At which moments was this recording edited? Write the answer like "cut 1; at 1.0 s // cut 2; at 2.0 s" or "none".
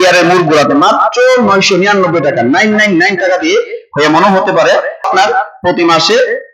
cut 1; at 5.1 s